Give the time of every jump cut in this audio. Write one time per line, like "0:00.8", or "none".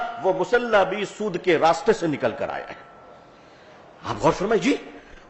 none